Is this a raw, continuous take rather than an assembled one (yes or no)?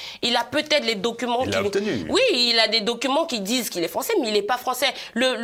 yes